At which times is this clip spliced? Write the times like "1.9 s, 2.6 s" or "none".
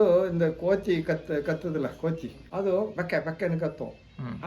2.4 s